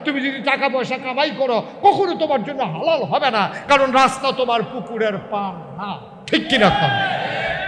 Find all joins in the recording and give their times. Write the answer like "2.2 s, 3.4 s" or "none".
none